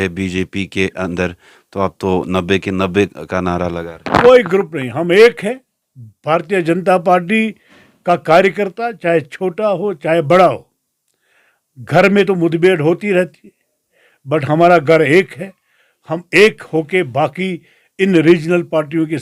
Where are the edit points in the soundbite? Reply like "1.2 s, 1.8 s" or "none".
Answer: none

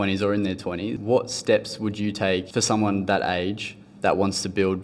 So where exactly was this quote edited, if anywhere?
0.9 s, 2.5 s

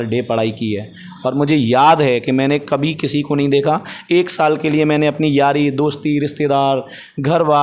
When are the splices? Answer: none

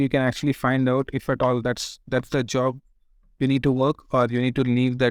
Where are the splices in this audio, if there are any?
none

